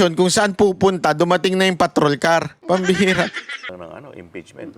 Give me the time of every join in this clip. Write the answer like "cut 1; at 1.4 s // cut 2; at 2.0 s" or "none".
cut 1; at 3.7 s